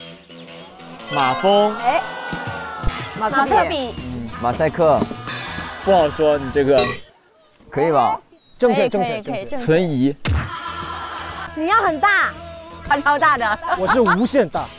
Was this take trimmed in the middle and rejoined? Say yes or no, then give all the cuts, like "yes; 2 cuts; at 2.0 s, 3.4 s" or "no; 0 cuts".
yes; 1 cut; at 11.4 s